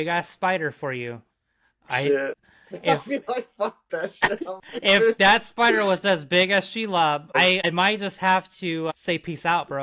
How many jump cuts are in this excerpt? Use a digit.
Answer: 2